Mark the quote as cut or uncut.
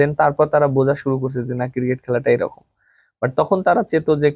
uncut